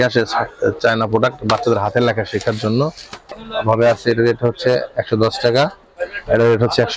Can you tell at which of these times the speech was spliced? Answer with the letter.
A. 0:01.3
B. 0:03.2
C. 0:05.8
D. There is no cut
B